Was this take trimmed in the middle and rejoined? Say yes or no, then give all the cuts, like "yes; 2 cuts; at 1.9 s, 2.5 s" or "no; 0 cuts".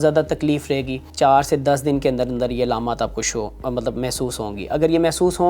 yes; 1 cut; at 1.0 s